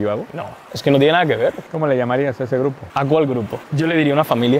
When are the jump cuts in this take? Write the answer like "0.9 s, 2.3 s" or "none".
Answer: 1.6 s, 3.6 s